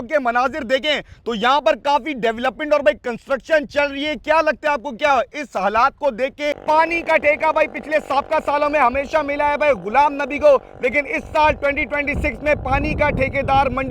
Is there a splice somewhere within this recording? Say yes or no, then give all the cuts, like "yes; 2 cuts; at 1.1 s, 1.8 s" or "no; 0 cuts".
yes; 1 cut; at 6.6 s